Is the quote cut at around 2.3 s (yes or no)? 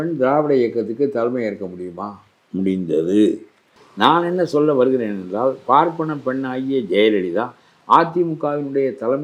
no